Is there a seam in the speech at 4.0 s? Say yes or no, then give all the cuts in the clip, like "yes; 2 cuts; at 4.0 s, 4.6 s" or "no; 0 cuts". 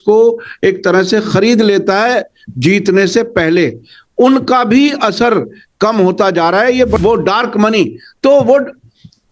no; 1 cut; at 7.0 s